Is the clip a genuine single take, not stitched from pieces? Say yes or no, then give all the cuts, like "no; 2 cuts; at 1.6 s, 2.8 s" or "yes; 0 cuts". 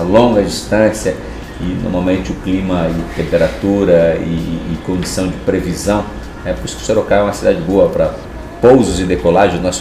no; 1 cut; at 1.4 s